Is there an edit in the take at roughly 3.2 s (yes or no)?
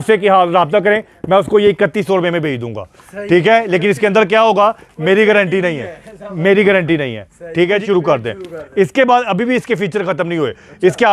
no